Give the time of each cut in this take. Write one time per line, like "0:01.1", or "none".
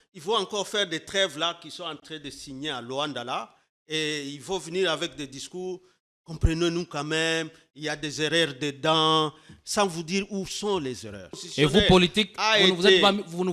0:11.4